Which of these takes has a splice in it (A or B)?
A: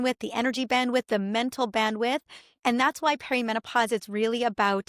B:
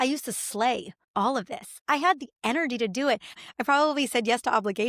B